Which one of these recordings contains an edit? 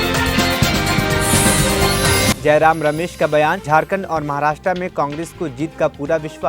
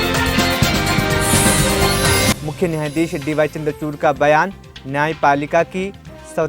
first; 1 cut; at 2.3 s

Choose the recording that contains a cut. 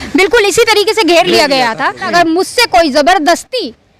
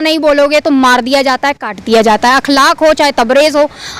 first; 1 cut; at 2.0 s

